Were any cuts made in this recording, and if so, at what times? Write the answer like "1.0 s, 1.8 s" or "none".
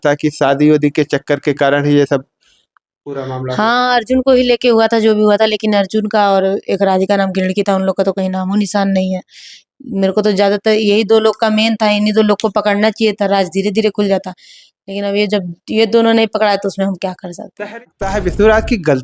17.8 s